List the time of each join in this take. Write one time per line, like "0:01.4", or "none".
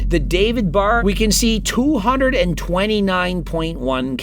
0:01.0